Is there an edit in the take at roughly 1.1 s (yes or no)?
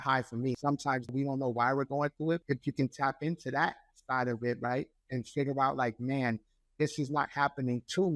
yes